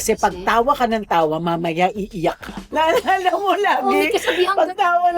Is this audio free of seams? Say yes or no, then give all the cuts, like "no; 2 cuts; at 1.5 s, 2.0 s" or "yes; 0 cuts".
yes; 0 cuts